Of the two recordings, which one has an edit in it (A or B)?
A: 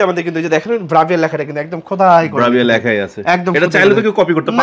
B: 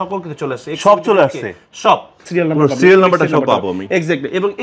B